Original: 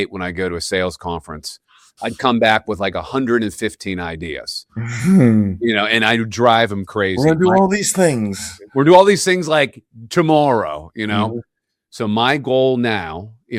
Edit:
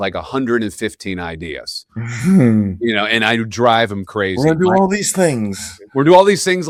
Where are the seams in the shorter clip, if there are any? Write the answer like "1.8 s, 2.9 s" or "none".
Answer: none